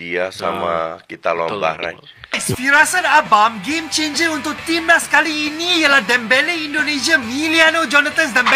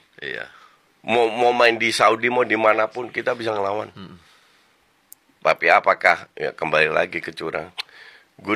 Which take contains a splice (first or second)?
first